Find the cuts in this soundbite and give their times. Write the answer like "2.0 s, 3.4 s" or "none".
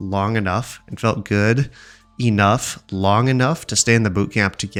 none